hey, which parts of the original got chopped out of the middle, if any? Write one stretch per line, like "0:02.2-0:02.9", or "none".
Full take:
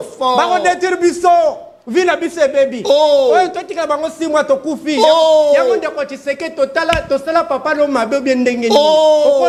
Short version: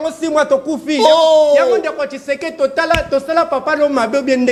none